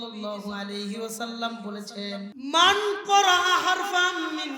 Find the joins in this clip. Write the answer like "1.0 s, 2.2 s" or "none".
2.3 s